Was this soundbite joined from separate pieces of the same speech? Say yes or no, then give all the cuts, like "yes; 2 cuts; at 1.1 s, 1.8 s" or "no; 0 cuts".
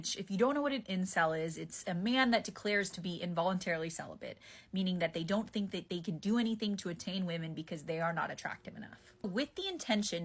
no; 0 cuts